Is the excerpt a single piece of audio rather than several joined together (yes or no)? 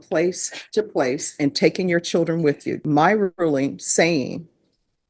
no